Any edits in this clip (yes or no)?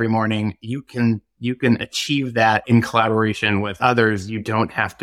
yes